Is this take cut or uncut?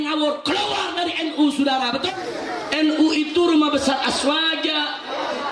cut